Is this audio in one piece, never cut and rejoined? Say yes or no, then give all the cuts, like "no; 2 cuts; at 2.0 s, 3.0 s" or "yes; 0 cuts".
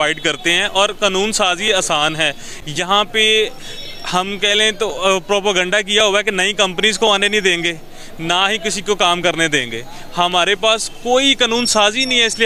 yes; 0 cuts